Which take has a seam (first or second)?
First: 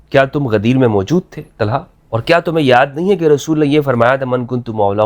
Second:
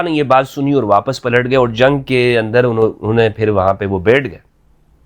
first